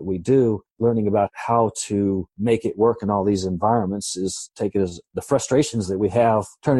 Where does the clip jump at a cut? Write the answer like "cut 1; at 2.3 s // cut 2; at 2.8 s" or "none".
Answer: none